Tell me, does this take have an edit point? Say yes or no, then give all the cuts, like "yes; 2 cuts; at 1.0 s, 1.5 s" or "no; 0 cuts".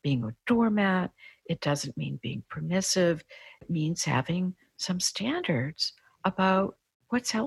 yes; 1 cut; at 3.7 s